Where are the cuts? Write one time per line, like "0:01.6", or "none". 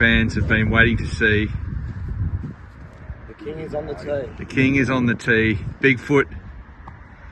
none